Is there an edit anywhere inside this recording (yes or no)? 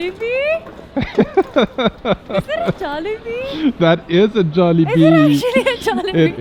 no